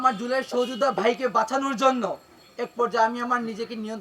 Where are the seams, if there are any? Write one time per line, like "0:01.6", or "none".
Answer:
none